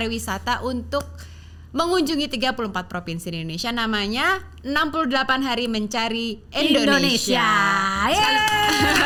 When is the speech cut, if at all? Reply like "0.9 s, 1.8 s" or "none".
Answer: none